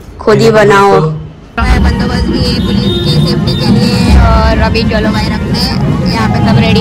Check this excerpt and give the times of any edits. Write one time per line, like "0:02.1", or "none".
0:01.6